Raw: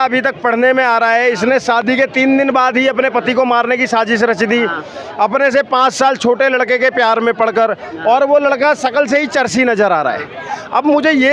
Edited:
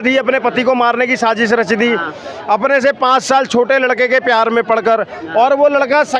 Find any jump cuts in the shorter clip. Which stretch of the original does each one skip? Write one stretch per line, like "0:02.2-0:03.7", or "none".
none